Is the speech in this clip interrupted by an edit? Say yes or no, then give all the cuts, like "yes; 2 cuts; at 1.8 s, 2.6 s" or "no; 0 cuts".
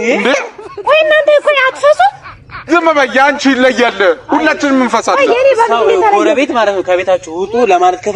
no; 0 cuts